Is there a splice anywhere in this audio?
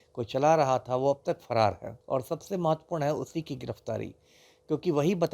yes; 1 cut; at 1.9 s

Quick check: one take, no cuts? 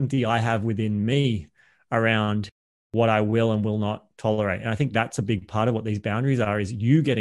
yes; 0 cuts

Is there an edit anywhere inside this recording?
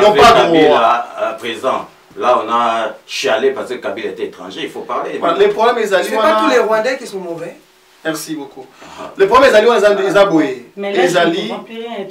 no; 0 cuts

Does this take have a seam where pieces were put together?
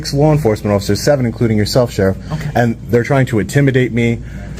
no; 0 cuts

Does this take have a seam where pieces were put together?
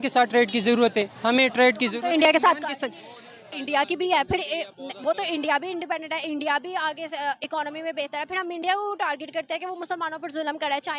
yes; 1 cut; at 3.5 s

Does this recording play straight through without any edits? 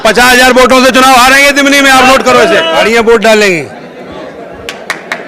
no; 1 cut; at 2.8 s

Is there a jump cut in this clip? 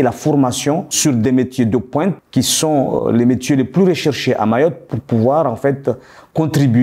no; 0 cuts

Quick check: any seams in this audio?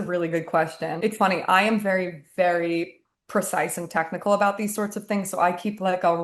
yes; 1 cut; at 0.9 s

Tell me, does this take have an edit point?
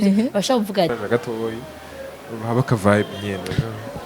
yes; 1 cut; at 0.9 s

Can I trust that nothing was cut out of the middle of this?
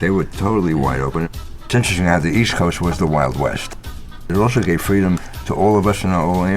no; 3 cuts; at 1.3 s, 3.8 s, 5.4 s

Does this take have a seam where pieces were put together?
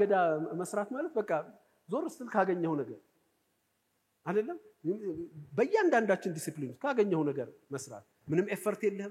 no; 0 cuts

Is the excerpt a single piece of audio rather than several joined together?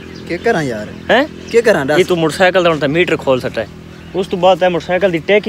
yes; 0 cuts

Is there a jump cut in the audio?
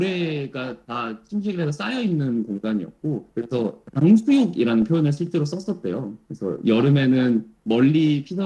no; 0 cuts

